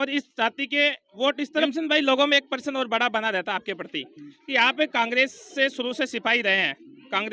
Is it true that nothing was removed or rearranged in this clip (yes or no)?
no